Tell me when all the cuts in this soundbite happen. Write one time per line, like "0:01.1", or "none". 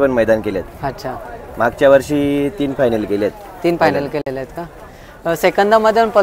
none